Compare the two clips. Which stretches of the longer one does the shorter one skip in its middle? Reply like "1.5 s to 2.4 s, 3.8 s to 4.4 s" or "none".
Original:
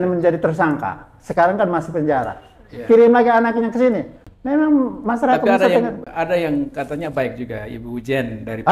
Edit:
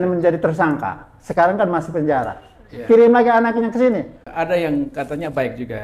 4.2 s to 6.0 s